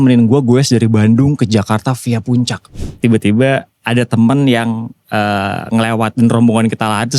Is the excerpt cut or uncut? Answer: cut